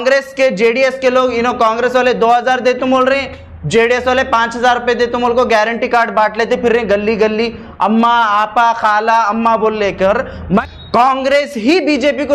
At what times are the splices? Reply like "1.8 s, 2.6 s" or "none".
10.6 s